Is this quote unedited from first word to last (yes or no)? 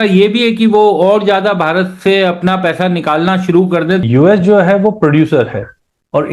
no